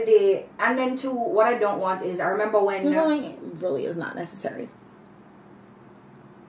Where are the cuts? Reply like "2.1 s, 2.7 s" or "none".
2.8 s